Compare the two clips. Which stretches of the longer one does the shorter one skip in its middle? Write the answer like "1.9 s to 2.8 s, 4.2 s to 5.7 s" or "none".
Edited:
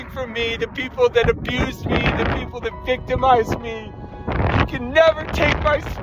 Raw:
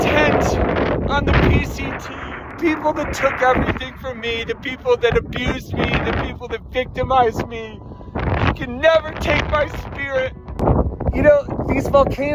none